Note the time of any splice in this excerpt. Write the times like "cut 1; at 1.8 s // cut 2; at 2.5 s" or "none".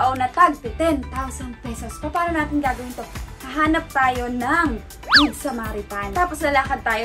cut 1; at 6.0 s